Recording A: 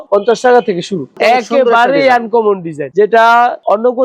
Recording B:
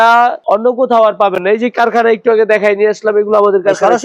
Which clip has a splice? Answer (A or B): A